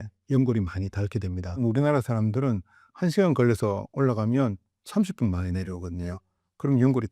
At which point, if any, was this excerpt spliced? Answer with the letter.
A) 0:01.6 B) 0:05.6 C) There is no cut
A